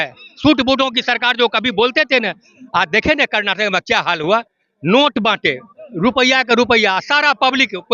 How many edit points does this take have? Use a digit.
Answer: 0